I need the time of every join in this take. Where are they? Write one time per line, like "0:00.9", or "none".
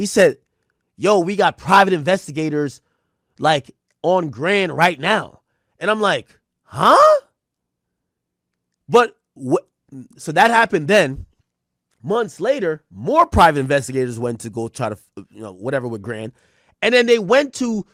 none